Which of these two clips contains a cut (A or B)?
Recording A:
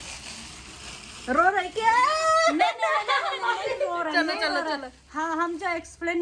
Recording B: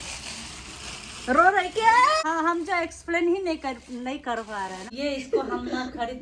B